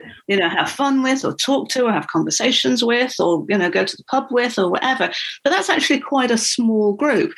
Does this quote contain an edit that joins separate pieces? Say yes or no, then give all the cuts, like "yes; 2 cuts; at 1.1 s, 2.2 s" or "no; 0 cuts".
no; 0 cuts